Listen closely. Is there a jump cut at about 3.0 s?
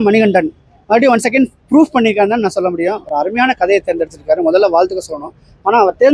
no; 0 cuts

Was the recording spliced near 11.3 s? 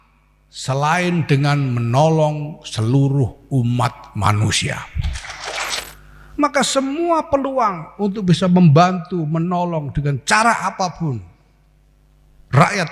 no; 1 cut; at 5.8 s

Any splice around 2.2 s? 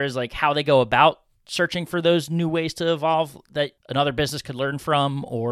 no; 1 cut; at 3.8 s

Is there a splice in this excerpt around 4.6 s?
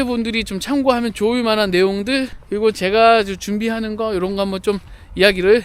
no; 1 cut; at 2.4 s

